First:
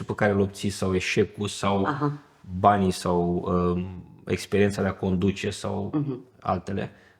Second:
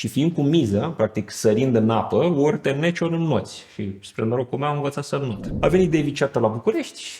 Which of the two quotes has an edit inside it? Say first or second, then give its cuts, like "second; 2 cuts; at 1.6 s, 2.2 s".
second; 1 cut; at 5.4 s